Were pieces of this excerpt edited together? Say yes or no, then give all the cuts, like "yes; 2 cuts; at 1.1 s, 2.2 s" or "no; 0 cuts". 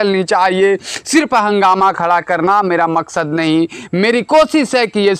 no; 0 cuts